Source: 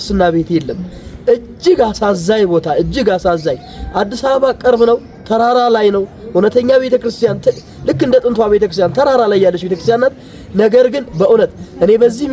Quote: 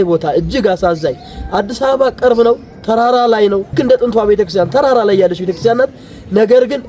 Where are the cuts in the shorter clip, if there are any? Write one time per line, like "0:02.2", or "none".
0:03.7